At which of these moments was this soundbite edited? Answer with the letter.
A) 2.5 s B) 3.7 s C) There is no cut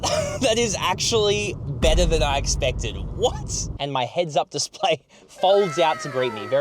B